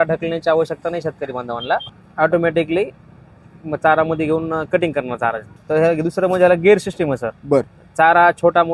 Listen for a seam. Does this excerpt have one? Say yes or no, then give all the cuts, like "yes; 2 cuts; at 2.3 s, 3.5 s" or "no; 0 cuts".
yes; 2 cuts; at 1.9 s, 5.5 s